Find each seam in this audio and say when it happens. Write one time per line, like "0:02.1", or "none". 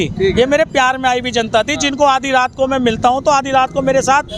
none